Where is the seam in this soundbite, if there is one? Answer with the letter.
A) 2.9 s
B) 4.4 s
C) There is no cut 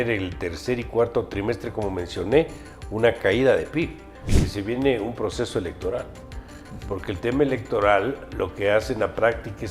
B